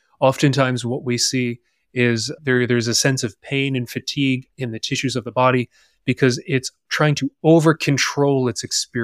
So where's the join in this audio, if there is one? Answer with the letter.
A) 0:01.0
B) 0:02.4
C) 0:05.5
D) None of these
B